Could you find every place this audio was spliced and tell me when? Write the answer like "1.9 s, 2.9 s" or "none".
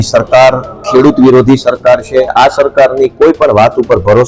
2.3 s

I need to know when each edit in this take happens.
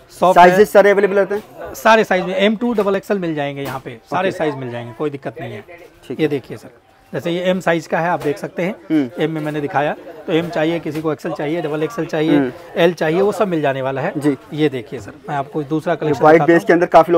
none

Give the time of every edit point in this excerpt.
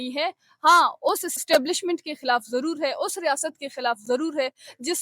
1.3 s

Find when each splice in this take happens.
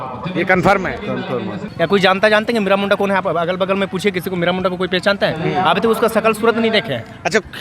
1.6 s

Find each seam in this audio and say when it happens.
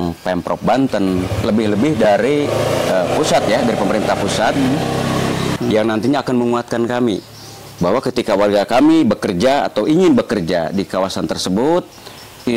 5.5 s

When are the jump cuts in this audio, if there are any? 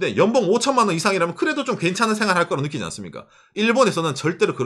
none

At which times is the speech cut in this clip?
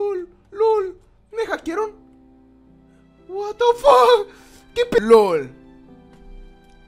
5.0 s

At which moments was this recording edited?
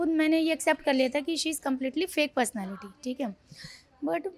none

